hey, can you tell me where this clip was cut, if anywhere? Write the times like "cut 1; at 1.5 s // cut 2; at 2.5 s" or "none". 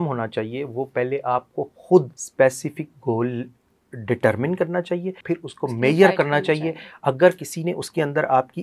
cut 1; at 2.2 s // cut 2; at 5.2 s